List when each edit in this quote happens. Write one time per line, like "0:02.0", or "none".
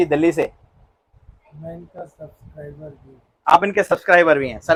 none